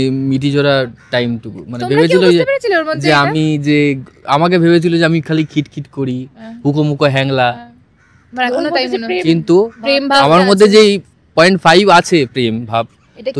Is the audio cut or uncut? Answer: uncut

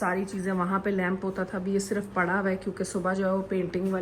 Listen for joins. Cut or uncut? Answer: uncut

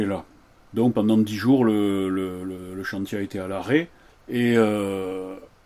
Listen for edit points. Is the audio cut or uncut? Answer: uncut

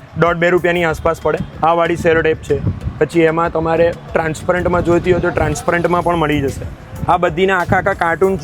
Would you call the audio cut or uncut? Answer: cut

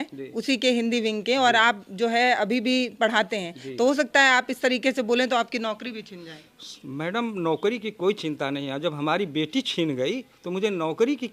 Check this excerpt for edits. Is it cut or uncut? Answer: uncut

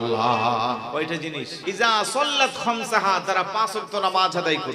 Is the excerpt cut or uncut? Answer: cut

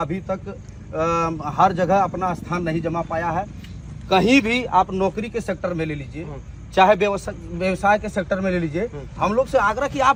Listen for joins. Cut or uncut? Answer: uncut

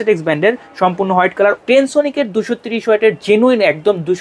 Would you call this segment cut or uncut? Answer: cut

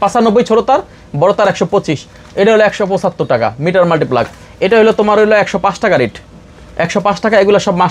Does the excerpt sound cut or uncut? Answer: uncut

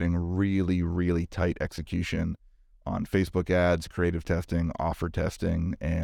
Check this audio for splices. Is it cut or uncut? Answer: uncut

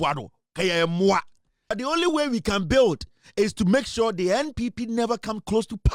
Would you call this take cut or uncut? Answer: cut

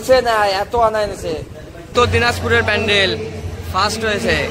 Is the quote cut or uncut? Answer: cut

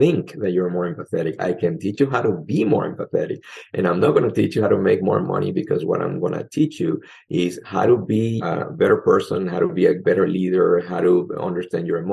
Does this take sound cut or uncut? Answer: cut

